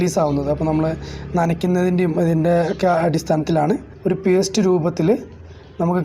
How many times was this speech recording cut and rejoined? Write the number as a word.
one